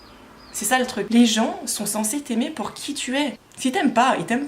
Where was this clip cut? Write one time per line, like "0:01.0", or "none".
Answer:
0:01.1